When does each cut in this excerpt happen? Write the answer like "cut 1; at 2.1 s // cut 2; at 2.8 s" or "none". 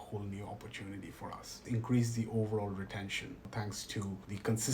cut 1; at 1.6 s // cut 2; at 3.9 s